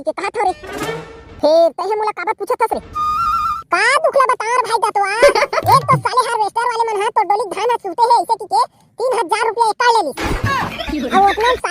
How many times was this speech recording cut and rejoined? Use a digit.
0